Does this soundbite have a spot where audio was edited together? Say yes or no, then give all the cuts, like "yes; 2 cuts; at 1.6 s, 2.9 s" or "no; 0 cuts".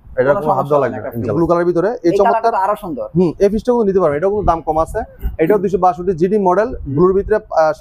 yes; 1 cut; at 1.3 s